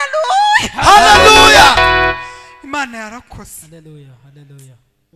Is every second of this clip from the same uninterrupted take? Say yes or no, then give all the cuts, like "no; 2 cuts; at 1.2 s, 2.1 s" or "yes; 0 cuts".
yes; 0 cuts